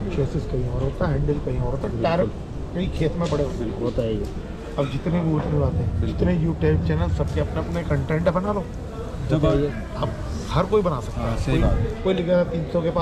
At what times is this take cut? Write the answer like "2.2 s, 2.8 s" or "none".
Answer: none